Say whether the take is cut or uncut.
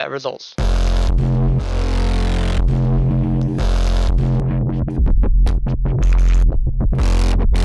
cut